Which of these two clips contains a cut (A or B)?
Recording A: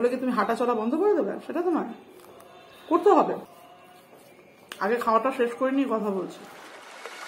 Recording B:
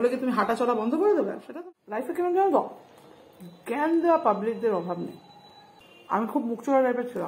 B